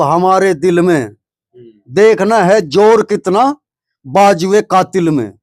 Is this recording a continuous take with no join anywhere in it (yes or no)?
yes